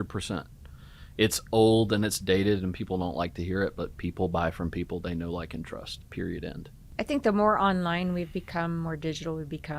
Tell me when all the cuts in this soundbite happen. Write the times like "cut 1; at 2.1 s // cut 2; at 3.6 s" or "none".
cut 1; at 6.7 s